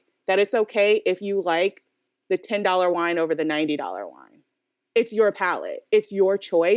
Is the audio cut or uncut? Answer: uncut